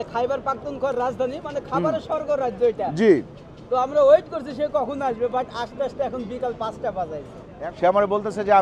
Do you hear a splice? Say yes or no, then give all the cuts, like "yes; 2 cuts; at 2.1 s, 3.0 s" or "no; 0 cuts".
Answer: yes; 1 cut; at 7.4 s